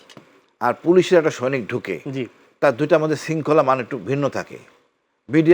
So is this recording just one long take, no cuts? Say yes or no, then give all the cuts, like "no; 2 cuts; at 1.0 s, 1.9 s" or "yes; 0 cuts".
yes; 0 cuts